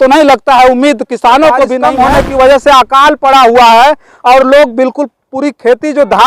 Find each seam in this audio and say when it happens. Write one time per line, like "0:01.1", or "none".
0:01.8